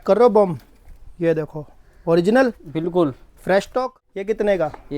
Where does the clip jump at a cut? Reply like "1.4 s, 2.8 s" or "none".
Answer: 3.8 s